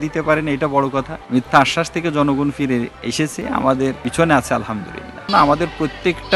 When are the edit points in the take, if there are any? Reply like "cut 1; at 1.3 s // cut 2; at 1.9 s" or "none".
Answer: cut 1; at 1.2 s // cut 2; at 3.0 s // cut 3; at 4.0 s // cut 4; at 5.3 s